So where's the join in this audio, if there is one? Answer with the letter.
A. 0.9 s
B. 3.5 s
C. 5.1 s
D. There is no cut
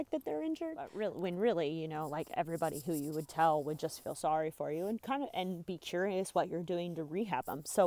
A